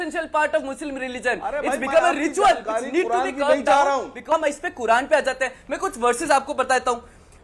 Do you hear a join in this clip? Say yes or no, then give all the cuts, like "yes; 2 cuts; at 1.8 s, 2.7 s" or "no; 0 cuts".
yes; 1 cut; at 4.3 s